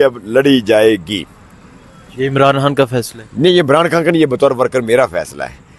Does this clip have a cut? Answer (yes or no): no